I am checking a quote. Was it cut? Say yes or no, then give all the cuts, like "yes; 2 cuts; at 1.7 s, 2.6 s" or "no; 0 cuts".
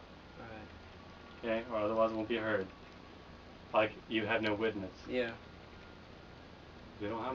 yes; 1 cut; at 4.1 s